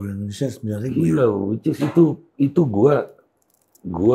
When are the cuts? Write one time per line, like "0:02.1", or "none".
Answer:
none